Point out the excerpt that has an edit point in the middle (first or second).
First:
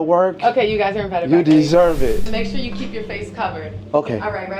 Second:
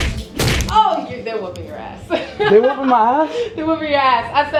first